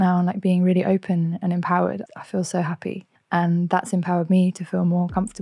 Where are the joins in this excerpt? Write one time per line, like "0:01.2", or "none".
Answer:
0:02.0
0:03.1